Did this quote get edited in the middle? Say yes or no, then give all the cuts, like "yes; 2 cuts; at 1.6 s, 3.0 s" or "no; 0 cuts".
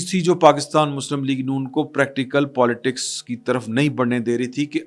no; 0 cuts